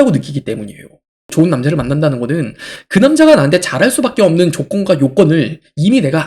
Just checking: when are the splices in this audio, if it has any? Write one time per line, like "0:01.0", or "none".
0:01.3

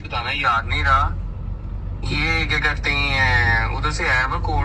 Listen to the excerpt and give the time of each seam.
none

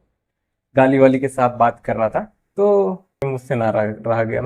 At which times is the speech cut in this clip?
0:03.2

